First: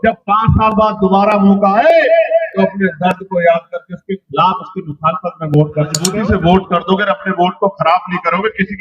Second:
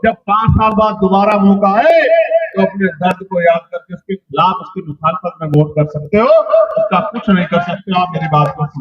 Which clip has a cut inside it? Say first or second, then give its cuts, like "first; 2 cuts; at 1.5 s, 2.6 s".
first; 1 cut; at 6.0 s